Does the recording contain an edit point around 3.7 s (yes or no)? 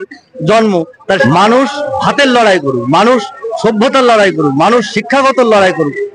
no